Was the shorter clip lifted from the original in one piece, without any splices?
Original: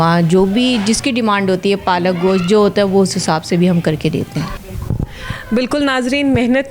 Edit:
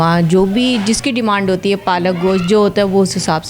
yes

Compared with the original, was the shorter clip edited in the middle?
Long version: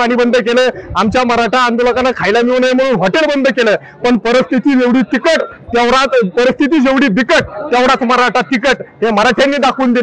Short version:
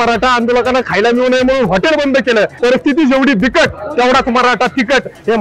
yes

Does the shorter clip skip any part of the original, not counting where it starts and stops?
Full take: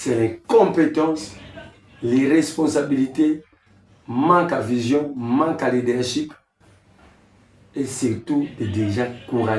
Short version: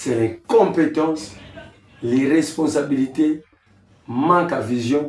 no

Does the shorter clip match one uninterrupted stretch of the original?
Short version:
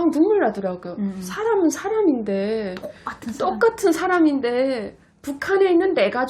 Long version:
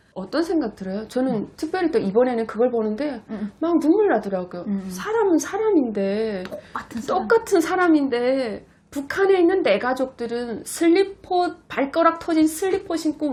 yes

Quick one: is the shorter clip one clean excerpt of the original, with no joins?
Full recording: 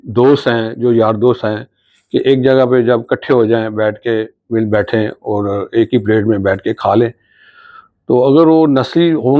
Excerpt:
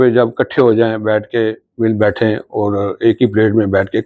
yes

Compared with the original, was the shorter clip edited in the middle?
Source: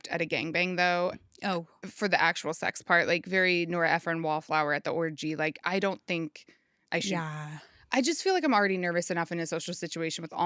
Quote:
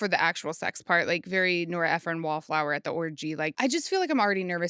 yes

